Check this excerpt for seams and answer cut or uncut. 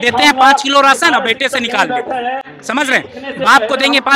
uncut